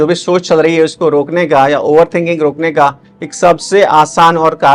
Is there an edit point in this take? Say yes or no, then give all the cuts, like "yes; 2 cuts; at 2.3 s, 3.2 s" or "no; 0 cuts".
no; 0 cuts